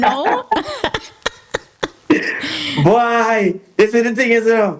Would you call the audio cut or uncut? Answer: uncut